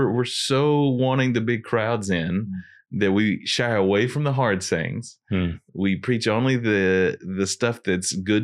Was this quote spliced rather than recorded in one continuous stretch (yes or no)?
no